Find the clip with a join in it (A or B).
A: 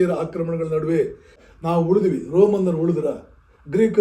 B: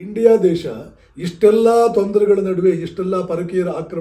A